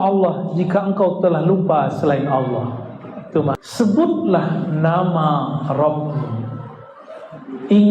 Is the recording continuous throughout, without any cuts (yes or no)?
no